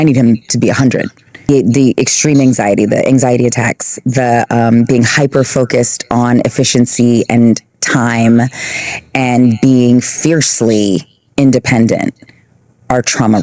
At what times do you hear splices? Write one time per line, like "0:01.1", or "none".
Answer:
0:01.5